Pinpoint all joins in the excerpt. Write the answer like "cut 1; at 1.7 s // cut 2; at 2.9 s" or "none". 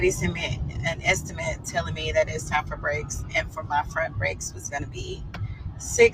none